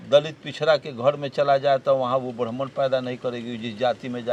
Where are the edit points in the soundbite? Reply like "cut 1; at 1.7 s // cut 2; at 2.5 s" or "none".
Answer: none